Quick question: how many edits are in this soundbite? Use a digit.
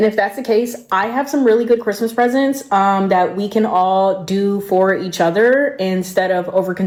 0